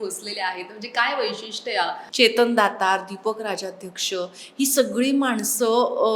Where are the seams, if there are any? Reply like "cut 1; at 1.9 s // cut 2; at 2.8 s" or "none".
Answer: cut 1; at 2.0 s